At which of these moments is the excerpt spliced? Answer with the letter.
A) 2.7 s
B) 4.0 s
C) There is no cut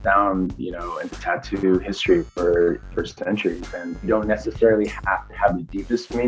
B